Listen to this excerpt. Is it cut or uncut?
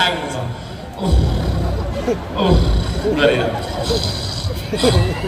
uncut